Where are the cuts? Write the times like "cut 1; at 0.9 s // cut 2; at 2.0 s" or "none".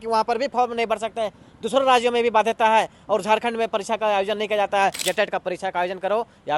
cut 1; at 5.0 s